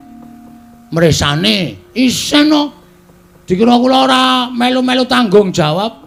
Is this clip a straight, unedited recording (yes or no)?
yes